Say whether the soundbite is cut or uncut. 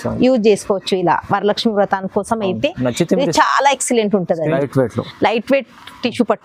cut